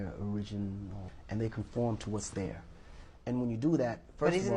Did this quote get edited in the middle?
no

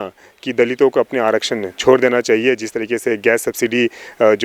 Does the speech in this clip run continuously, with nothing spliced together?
yes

